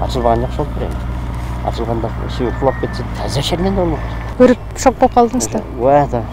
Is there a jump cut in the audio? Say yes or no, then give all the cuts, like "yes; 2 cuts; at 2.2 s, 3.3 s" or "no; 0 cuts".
yes; 1 cut; at 4.2 s